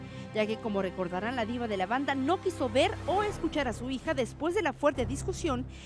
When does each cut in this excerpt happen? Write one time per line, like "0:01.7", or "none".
0:00.9

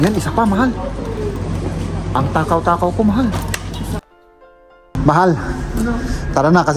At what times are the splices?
0:04.3

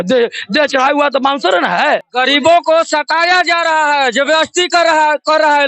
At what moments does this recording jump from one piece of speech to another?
0:02.1

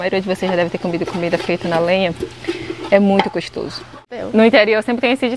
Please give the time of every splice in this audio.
0:04.1

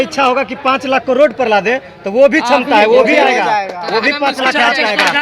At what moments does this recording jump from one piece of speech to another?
none

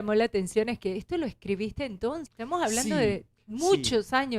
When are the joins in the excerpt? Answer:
0:02.3

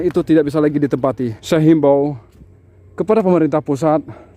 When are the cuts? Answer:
0:01.4

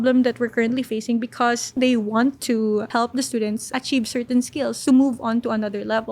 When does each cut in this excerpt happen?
0:01.8
0:04.8

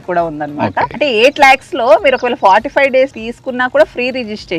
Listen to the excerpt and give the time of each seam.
0:00.9
0:03.3

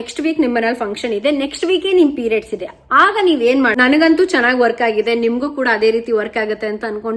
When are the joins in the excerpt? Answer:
0:03.7

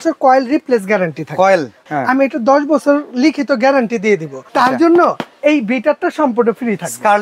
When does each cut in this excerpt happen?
0:01.8
0:04.4

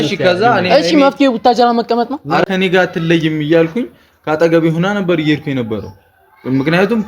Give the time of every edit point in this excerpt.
0:02.4

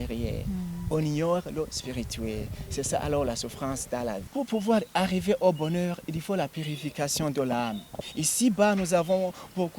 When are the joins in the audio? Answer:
0:04.2
0:08.0

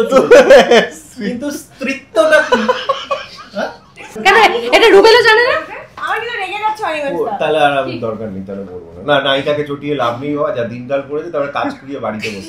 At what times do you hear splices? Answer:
0:04.2

